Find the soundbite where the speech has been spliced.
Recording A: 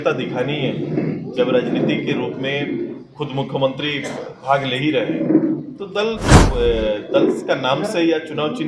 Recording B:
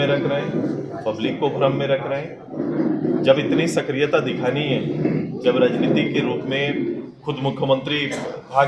A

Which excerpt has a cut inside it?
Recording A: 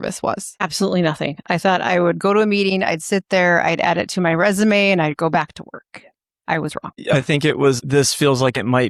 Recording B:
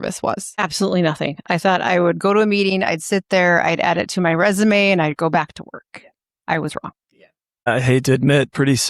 A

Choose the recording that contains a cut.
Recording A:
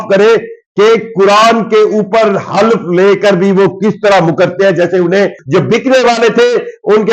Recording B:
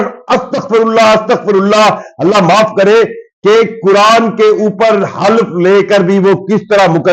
A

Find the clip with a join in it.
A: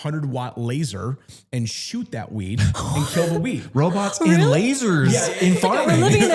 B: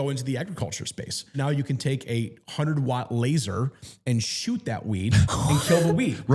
B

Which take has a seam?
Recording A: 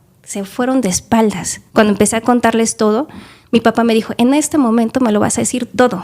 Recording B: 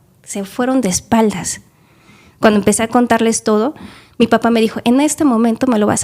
A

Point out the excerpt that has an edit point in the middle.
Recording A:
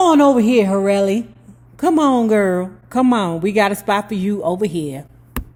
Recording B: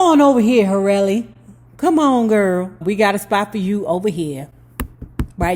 B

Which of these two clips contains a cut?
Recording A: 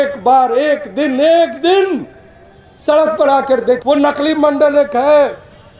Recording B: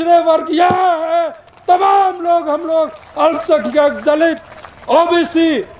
A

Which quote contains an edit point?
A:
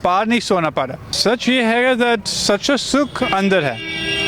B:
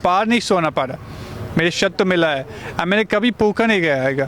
A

